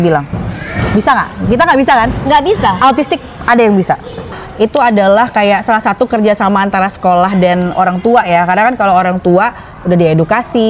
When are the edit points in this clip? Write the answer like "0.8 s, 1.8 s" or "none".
4.4 s